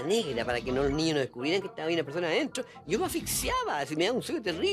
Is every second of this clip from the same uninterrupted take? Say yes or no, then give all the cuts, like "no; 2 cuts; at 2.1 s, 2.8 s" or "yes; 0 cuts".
yes; 0 cuts